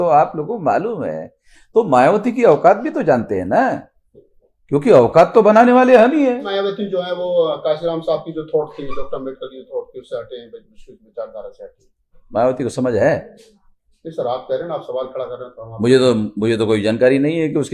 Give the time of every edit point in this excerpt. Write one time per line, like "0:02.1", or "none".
0:06.5